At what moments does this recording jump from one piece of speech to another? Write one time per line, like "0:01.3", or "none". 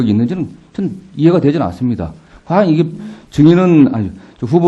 0:02.9